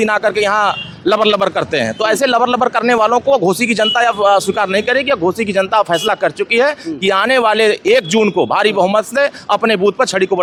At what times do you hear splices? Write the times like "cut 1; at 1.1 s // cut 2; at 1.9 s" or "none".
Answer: none